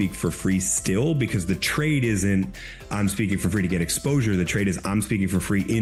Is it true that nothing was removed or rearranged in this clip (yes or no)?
yes